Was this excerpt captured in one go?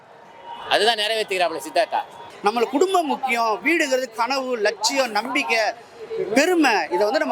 no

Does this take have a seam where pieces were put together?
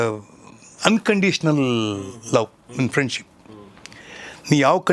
no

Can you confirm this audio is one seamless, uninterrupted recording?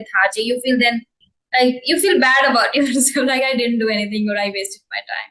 yes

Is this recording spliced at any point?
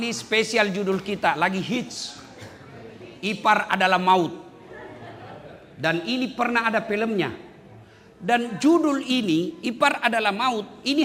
no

